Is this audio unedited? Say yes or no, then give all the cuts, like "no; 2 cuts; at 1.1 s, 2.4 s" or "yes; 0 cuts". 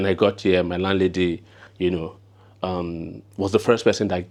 yes; 0 cuts